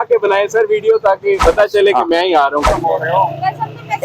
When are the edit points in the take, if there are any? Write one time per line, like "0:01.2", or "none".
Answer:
0:01.4
0:02.7